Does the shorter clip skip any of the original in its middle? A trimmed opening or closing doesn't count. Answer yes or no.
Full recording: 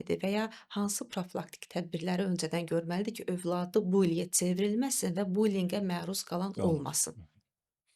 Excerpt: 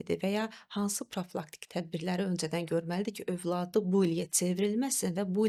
no